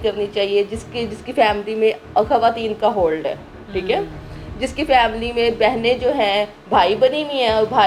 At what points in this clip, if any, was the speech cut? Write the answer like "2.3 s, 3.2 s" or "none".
none